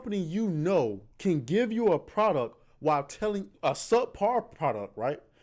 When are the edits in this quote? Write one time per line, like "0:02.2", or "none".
0:01.1
0:03.5